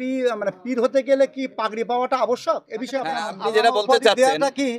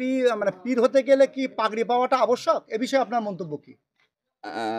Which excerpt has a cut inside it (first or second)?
first